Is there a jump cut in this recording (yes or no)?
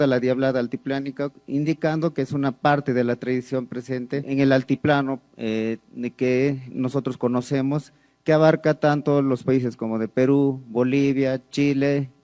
yes